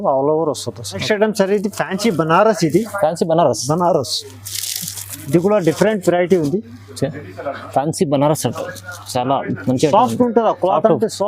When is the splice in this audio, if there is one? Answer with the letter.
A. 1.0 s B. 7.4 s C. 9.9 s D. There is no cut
A